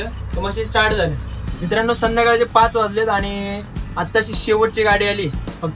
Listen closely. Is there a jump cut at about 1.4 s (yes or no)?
yes